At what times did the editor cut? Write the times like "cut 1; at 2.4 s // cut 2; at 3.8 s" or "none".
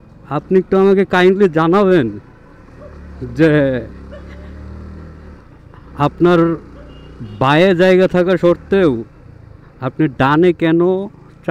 none